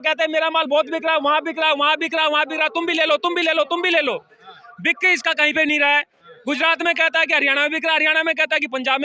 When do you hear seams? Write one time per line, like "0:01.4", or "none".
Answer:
none